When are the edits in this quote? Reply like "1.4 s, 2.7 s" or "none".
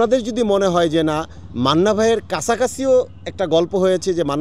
none